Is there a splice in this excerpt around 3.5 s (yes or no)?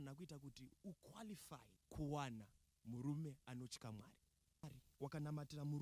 no